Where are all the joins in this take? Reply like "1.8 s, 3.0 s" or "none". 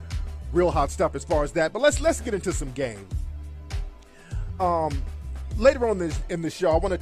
none